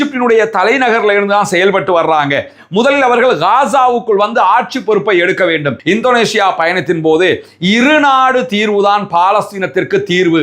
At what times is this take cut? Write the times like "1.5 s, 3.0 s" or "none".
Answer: 5.7 s